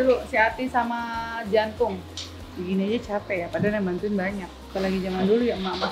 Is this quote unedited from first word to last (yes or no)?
yes